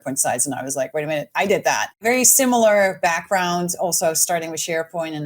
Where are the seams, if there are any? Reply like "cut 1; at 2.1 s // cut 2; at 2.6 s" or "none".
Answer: cut 1; at 2.0 s